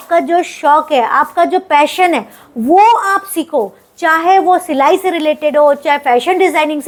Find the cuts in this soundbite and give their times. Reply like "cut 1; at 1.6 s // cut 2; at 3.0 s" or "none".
none